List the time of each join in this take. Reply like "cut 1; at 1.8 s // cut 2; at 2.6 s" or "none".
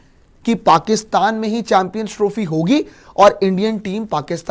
none